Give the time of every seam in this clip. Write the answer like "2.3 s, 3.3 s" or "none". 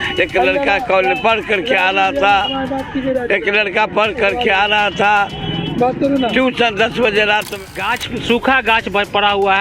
7.6 s